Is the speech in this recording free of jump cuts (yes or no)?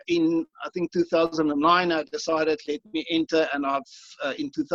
yes